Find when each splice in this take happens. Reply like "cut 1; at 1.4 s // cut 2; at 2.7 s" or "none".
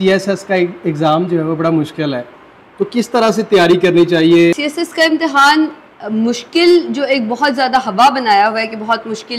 cut 1; at 4.6 s

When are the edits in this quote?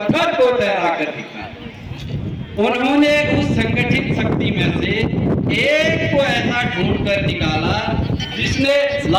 none

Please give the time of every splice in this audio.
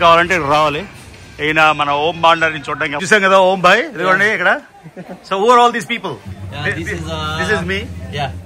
cut 1; at 3.0 s

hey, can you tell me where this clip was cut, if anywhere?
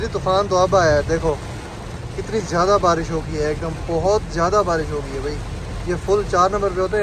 none

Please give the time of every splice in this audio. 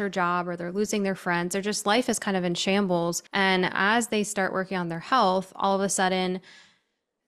cut 1; at 3.2 s

